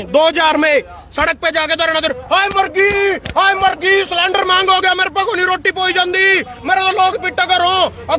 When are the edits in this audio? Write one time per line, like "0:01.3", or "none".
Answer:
none